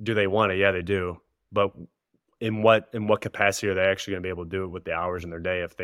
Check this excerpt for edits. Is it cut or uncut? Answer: uncut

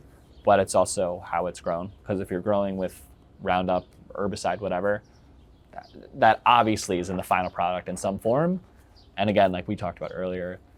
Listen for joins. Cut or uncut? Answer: uncut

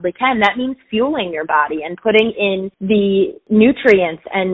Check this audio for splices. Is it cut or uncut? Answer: cut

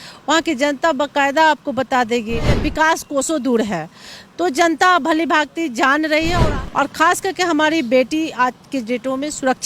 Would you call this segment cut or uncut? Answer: cut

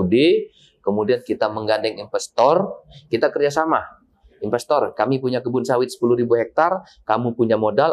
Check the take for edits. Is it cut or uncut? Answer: uncut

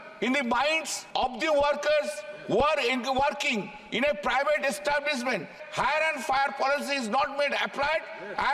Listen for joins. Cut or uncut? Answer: cut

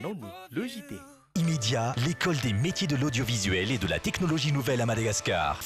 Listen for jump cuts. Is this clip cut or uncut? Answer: cut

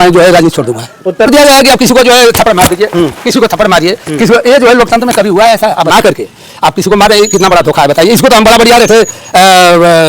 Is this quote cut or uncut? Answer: cut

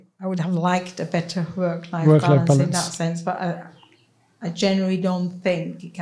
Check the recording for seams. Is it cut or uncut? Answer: uncut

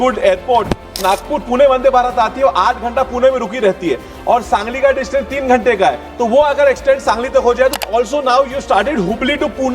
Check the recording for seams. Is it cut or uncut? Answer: cut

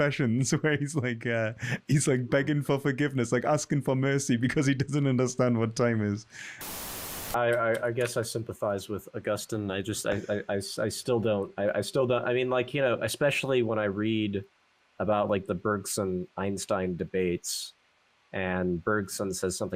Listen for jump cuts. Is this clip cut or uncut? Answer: cut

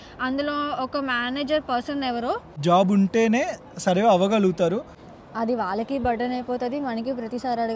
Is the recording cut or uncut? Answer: cut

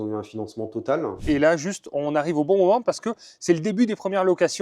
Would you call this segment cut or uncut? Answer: cut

